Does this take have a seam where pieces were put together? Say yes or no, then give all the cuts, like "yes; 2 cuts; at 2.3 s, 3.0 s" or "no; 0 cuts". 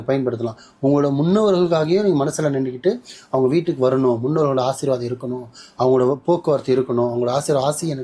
no; 0 cuts